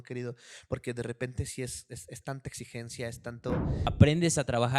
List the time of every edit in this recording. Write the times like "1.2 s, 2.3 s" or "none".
3.8 s